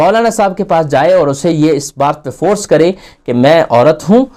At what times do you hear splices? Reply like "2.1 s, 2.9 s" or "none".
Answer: none